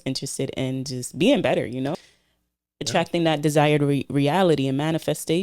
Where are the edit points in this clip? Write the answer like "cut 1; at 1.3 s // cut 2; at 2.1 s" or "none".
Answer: cut 1; at 1.9 s